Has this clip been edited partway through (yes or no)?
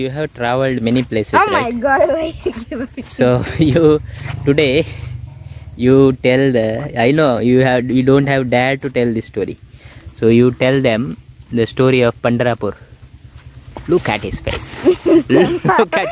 no